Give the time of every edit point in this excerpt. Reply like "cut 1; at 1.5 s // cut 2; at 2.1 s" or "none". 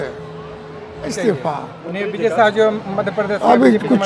cut 1; at 1.2 s